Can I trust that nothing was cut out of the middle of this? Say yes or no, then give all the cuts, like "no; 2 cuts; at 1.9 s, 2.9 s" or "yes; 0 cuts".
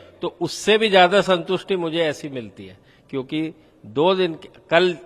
yes; 0 cuts